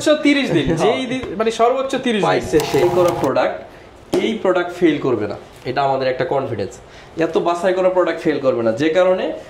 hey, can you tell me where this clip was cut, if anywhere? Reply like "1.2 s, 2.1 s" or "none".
2.8 s